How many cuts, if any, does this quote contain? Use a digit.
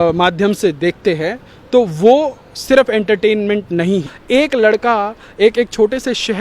1